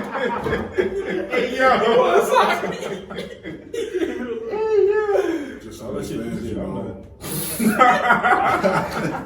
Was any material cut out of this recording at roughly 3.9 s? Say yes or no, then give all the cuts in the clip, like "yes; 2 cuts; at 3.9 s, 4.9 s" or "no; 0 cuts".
no; 1 cut; at 5.7 s